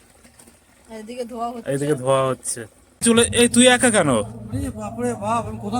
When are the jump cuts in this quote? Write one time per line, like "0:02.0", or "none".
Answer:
0:03.0